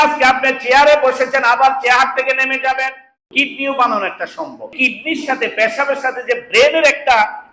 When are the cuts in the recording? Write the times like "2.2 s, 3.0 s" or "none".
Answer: 3.3 s, 4.7 s